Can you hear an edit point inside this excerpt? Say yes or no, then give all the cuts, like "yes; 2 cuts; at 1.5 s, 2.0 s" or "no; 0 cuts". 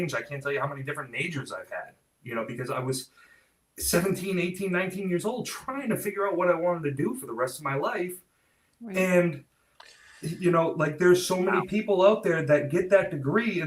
no; 0 cuts